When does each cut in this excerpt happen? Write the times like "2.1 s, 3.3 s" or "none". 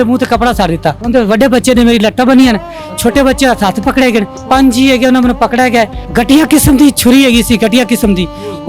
1.0 s, 4.4 s, 6.0 s

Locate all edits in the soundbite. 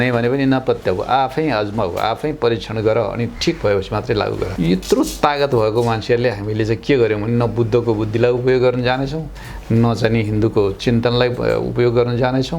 4.5 s

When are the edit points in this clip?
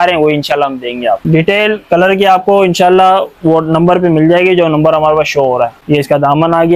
1.2 s, 5.8 s

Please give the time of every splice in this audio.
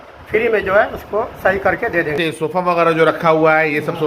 2.2 s

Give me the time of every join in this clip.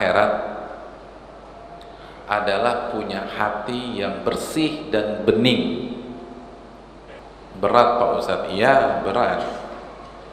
7.2 s

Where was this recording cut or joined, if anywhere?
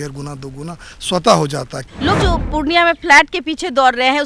1.8 s

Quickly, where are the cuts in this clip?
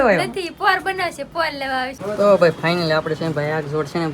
2.0 s

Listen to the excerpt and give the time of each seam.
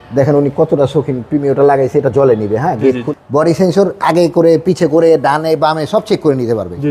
3.0 s

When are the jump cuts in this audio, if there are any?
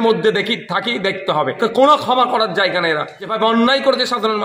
1.6 s, 3.2 s

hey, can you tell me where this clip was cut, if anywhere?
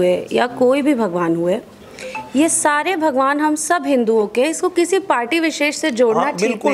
none

